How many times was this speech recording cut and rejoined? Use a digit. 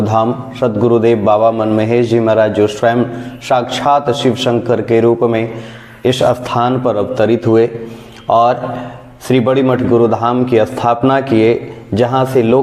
0